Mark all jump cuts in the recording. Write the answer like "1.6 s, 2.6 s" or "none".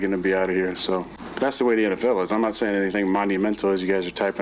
1.2 s